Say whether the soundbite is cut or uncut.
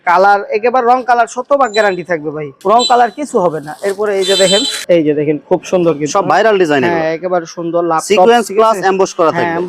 uncut